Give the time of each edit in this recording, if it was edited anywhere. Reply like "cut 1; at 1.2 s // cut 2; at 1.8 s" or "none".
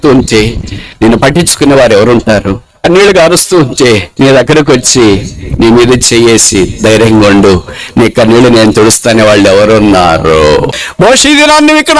cut 1; at 2.8 s // cut 2; at 10.8 s

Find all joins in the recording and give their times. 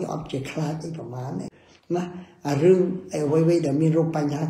cut 1; at 1.6 s

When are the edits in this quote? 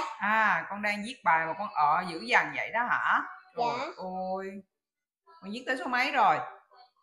none

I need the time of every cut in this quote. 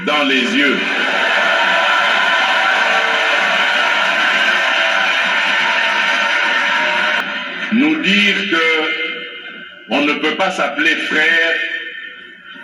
cut 1; at 7.2 s

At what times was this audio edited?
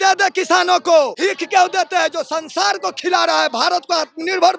cut 1; at 1.1 s

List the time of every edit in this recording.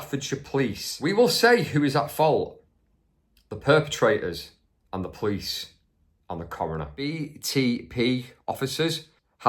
cut 1; at 0.9 s // cut 2; at 7.3 s

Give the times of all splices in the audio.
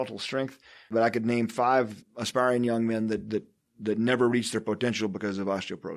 cut 1; at 0.9 s // cut 2; at 2.0 s

